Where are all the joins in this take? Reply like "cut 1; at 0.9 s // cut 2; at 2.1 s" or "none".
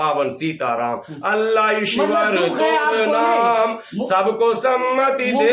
none